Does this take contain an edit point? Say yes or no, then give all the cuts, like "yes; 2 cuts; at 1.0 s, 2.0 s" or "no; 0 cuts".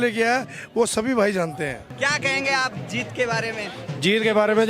no; 0 cuts